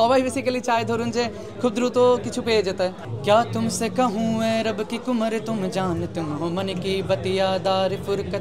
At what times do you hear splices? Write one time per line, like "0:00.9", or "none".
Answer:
0:03.1